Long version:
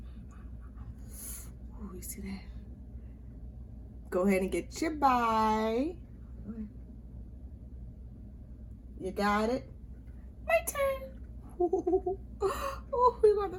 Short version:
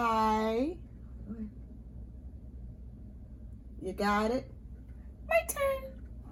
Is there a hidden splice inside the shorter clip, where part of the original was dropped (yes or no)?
no